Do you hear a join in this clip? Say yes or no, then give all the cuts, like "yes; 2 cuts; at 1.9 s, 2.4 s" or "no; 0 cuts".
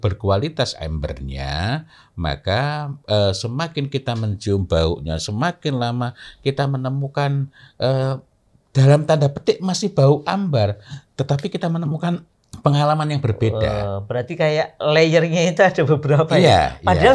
yes; 1 cut; at 12.2 s